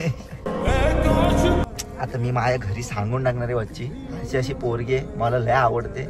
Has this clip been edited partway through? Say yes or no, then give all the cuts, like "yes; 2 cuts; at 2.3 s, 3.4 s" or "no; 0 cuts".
yes; 1 cut; at 1.6 s